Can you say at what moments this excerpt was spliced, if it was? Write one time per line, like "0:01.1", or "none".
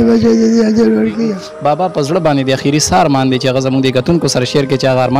0:01.5